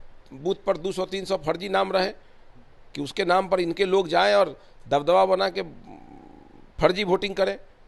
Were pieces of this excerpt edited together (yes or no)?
no